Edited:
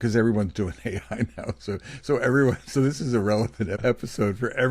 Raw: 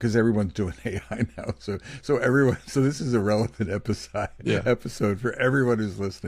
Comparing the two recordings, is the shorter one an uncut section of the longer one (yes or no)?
no